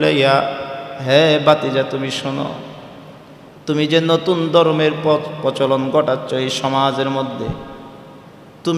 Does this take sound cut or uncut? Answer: uncut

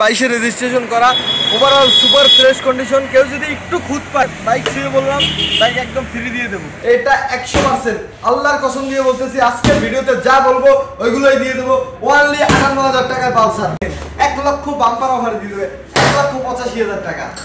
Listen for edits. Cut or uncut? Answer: cut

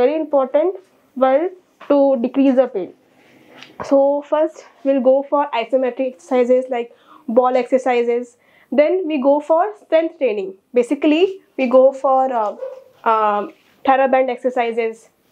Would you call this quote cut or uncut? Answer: uncut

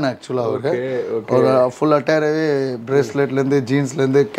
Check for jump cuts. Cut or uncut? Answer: uncut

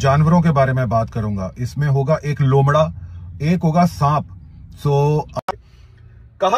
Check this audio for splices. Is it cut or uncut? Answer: cut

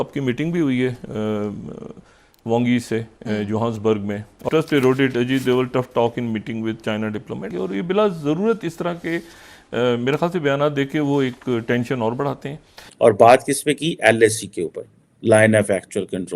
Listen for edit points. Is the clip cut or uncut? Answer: cut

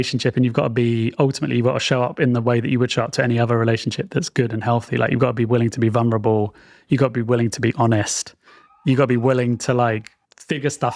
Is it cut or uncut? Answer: uncut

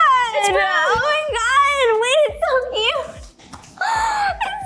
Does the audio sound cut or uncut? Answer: uncut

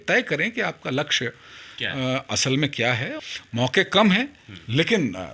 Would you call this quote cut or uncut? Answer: cut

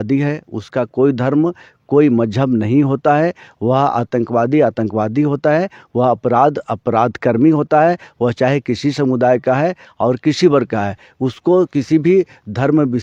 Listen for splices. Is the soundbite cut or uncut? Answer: uncut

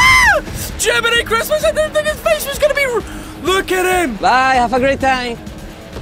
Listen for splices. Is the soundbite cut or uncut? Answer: cut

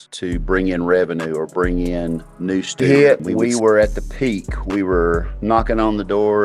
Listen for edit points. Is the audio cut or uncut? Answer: cut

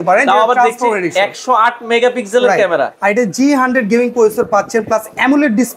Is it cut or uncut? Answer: uncut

